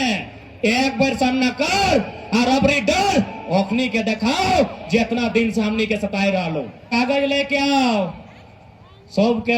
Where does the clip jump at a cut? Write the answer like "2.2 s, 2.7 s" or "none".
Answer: 6.8 s